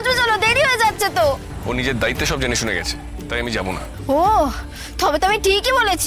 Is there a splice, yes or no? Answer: yes